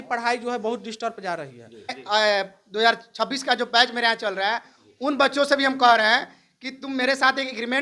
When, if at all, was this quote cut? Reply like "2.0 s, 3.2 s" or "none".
2.0 s